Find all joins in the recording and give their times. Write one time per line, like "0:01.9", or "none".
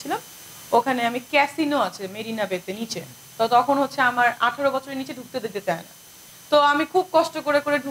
none